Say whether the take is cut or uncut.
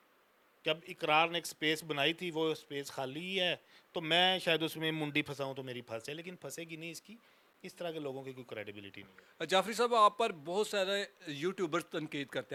uncut